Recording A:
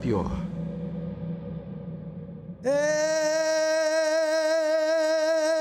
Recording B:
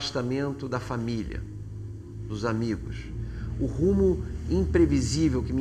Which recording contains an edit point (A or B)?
B